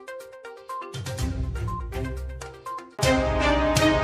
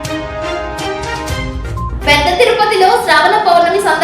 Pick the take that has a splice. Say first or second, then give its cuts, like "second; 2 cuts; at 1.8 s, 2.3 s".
second; 1 cut; at 1.9 s